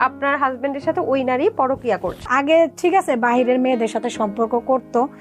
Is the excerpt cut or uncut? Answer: cut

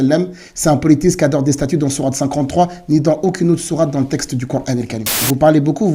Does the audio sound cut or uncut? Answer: cut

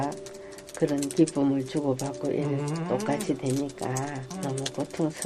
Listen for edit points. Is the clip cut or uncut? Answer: cut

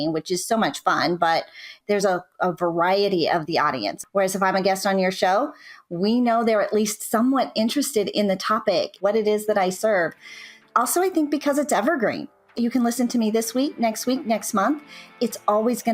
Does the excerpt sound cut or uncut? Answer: cut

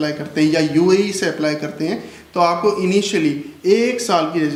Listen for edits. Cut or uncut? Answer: uncut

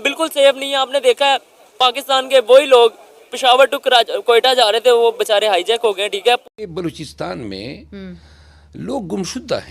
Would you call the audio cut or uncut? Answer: cut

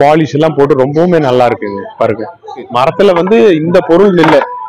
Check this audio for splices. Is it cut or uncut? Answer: cut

